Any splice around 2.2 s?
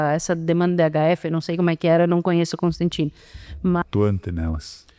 no; 1 cut; at 3.8 s

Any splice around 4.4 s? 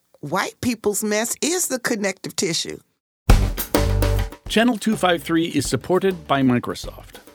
no; 1 cut; at 3.2 s

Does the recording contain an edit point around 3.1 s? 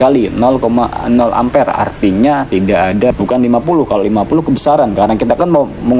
yes; 1 cut; at 3.1 s

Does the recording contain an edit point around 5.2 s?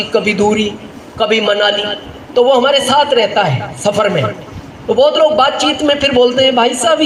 no; 0 cuts

